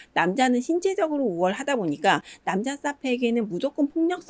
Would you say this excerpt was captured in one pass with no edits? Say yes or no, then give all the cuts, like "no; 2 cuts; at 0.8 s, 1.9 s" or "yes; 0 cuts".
no; 1 cut; at 2.3 s